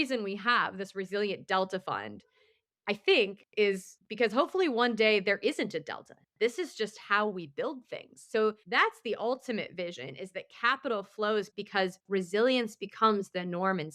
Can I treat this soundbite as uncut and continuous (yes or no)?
no